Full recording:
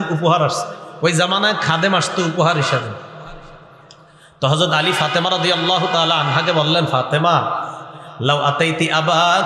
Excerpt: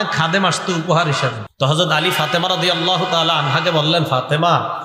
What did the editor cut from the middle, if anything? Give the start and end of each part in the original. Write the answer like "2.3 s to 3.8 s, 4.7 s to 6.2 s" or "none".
2.9 s to 4.3 s